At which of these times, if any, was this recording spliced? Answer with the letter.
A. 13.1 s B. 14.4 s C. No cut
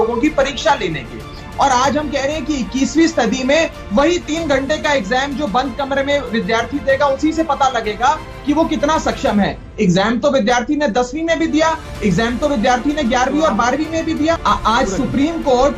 B